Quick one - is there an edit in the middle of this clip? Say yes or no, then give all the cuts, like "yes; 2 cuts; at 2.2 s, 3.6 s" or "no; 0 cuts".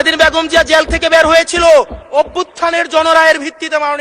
no; 0 cuts